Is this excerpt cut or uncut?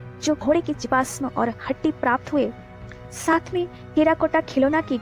uncut